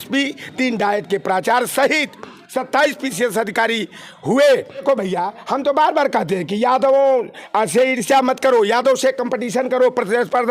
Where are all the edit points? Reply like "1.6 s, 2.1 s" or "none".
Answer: 4.8 s